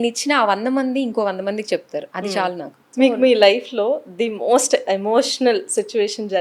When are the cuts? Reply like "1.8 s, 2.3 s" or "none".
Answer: 2.7 s

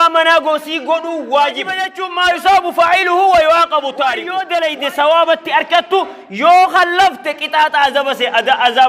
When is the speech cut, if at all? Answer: 2.0 s, 4.3 s

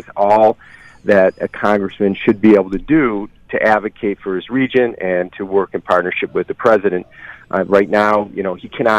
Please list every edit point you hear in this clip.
none

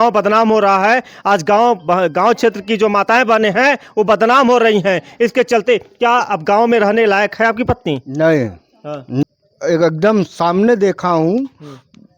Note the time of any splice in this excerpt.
9.2 s

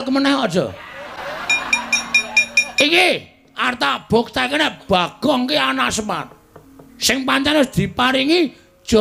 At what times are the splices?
1.2 s, 2.7 s

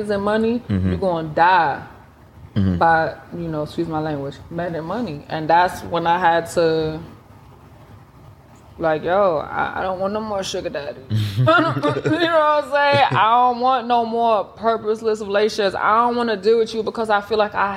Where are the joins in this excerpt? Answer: none

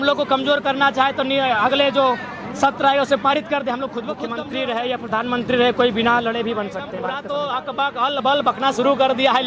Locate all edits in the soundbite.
4.3 s, 6.9 s

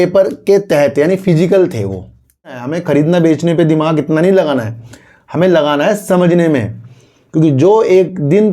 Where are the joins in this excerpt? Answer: 2.7 s

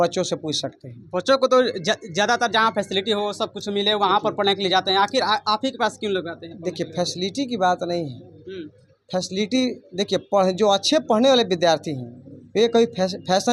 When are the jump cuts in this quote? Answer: none

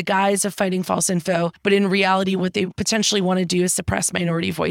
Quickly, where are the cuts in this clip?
1.5 s, 2.8 s

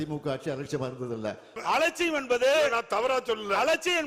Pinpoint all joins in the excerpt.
1.6 s

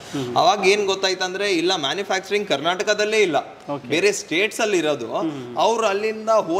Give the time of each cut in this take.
none

